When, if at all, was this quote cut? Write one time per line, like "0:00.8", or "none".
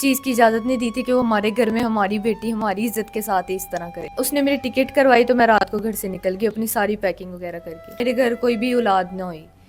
0:04.2
0:08.0